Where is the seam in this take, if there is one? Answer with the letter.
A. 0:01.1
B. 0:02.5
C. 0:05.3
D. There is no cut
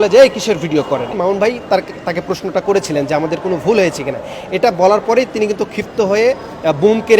A